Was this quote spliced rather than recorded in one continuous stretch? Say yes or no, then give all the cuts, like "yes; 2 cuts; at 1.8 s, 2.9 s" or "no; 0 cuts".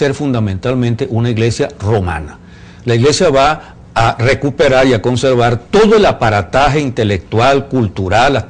yes; 1 cut; at 5.2 s